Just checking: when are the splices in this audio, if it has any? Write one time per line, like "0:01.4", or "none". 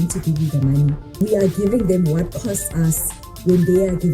0:01.2